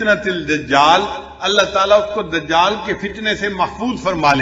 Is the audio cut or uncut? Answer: uncut